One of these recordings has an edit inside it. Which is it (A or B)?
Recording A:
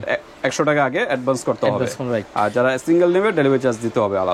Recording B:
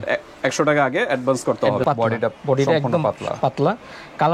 B